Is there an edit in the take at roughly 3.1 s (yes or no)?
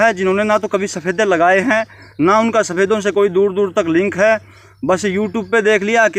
no